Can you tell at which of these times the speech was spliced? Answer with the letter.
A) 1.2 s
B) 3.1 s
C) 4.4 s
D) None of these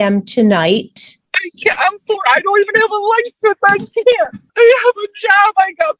C